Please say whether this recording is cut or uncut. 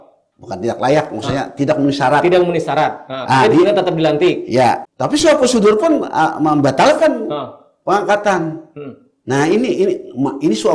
cut